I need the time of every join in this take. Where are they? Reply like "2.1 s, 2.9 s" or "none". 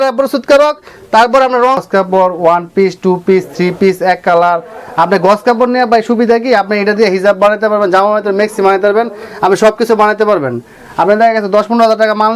1.8 s